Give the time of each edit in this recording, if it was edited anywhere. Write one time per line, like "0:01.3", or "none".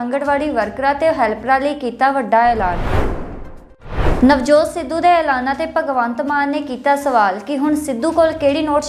0:02.8
0:04.0